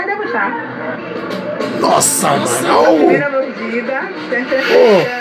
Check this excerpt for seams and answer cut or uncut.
uncut